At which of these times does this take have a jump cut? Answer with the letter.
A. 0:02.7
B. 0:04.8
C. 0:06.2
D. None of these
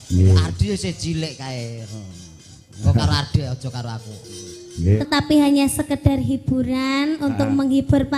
B